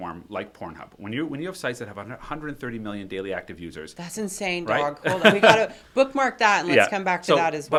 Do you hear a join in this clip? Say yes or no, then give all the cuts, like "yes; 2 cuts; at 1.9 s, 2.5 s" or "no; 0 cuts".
no; 0 cuts